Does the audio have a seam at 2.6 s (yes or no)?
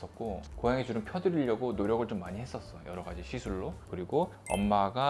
no